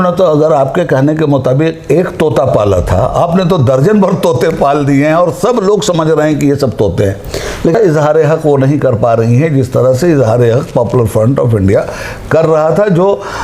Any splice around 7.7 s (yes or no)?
yes